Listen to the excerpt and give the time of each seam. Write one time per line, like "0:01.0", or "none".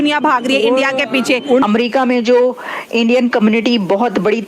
0:01.6